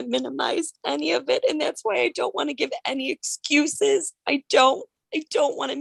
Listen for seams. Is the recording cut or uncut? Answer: uncut